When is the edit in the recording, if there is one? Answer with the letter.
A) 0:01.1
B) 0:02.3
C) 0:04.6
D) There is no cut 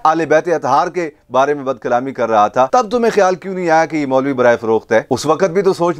D